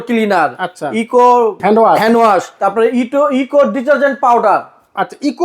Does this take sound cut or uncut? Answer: cut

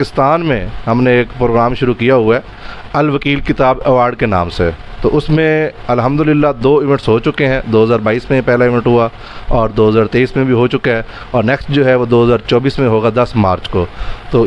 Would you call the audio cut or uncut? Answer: uncut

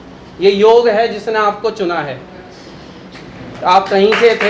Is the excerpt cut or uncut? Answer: uncut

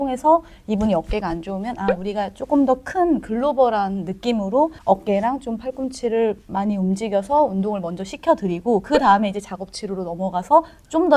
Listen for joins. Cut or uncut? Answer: uncut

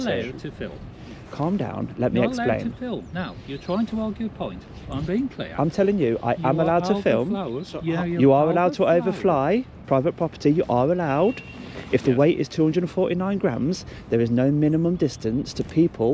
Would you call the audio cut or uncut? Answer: uncut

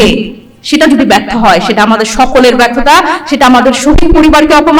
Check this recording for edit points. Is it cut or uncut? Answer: uncut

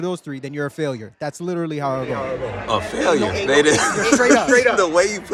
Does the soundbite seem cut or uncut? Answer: uncut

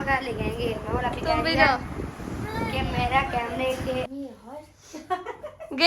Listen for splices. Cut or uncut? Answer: cut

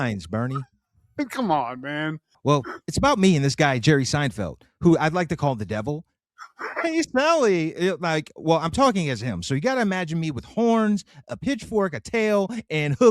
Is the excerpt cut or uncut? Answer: cut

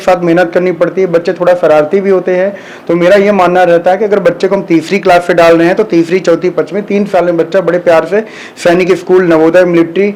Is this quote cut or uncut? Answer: uncut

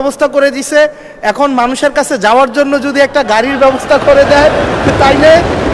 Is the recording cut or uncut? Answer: uncut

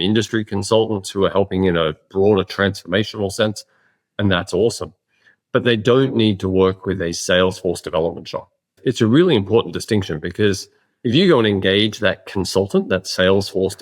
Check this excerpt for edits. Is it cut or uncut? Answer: cut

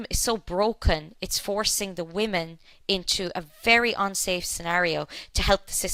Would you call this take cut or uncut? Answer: uncut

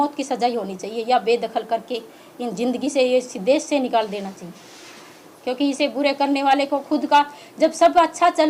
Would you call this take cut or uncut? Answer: uncut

